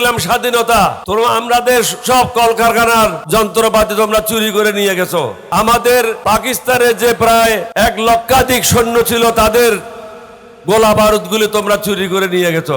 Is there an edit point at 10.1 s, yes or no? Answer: no